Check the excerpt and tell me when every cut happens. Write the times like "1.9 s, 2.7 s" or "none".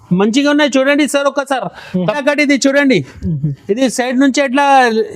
2.2 s